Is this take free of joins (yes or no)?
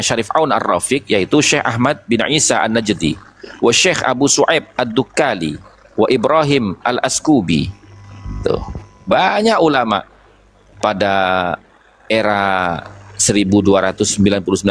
yes